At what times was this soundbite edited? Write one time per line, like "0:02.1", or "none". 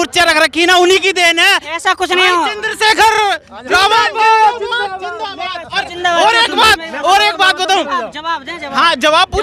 none